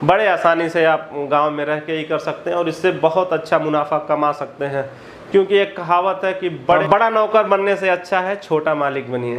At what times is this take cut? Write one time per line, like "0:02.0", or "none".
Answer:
none